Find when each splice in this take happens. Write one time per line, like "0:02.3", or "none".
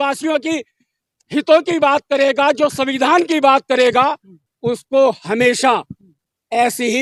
none